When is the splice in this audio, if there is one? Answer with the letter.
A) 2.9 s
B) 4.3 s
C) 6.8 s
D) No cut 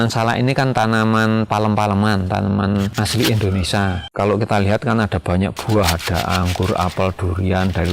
A